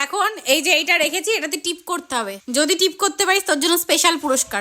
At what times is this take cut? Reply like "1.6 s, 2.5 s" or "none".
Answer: 2.4 s